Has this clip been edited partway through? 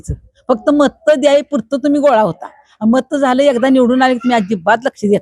no; 0 cuts

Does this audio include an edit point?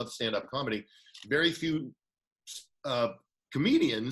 no; 0 cuts

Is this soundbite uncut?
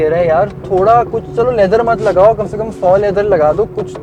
yes; 0 cuts

